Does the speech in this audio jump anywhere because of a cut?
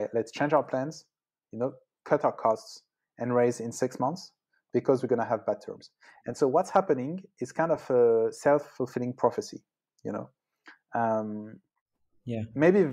no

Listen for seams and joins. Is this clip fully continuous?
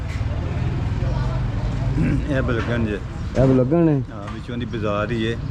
yes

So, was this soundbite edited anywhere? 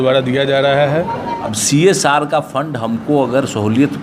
yes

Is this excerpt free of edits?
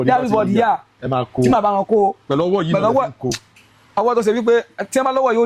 yes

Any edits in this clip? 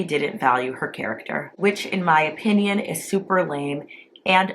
yes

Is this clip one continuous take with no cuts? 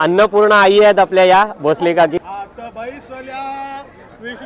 no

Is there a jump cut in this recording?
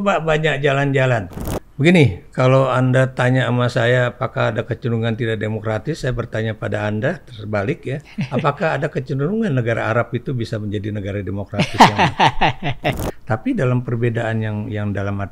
yes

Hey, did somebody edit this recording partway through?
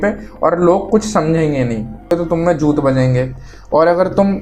yes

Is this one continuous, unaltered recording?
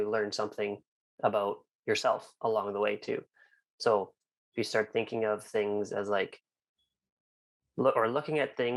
yes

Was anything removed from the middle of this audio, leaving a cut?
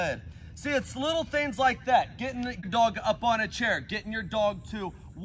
yes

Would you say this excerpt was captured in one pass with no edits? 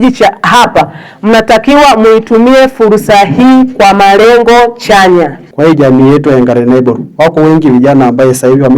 no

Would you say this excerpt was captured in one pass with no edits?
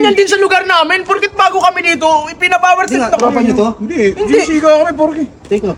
yes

